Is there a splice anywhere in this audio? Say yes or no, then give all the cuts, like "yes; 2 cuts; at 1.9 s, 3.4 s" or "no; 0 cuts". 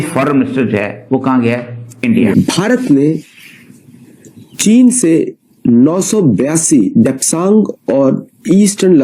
yes; 1 cut; at 2.3 s